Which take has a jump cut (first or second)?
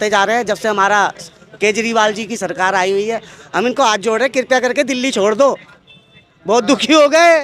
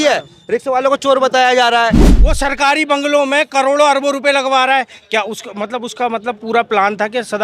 second